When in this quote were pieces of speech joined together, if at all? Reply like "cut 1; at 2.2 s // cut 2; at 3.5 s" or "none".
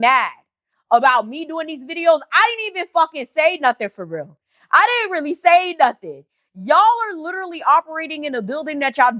none